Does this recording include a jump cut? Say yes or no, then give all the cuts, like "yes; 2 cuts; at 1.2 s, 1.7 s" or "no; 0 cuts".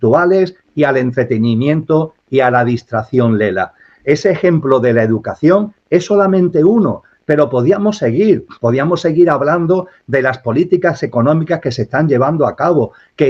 no; 0 cuts